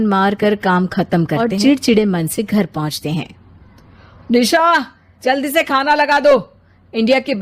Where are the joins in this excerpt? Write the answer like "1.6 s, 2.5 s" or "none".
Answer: 1.4 s